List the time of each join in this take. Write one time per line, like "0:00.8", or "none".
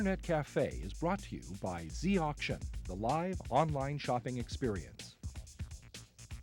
0:04.9